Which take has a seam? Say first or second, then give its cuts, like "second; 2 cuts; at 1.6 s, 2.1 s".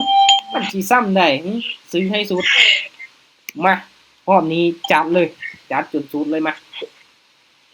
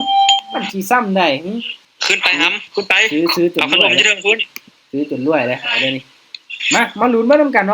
second; 1 cut; at 1.8 s